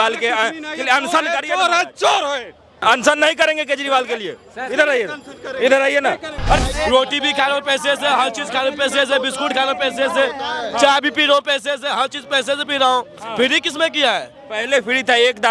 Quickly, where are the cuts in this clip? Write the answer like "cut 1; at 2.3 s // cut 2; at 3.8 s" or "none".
cut 1; at 2.8 s // cut 2; at 6.6 s